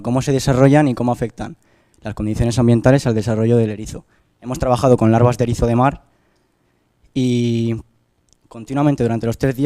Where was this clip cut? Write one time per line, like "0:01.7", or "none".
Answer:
0:02.3